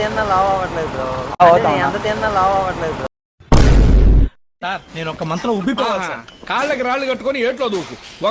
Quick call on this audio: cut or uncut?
uncut